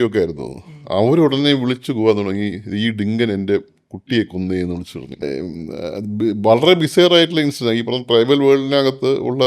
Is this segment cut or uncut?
cut